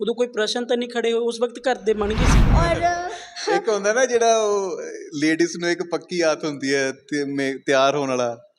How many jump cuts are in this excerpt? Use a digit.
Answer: 1